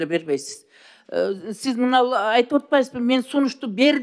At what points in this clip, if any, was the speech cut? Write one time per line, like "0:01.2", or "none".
none